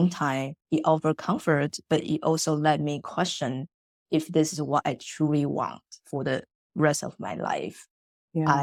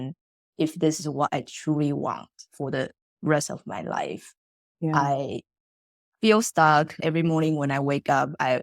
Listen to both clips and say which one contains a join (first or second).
second